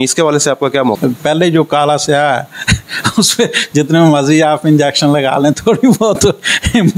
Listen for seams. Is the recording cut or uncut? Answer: cut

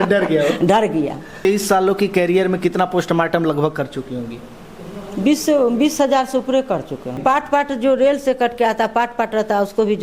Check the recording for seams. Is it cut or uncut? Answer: cut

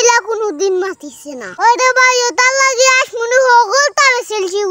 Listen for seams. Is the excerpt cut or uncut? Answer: cut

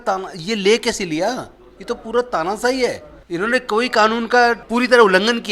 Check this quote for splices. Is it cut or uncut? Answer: cut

